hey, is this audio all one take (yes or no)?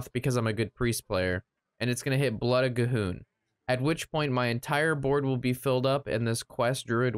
yes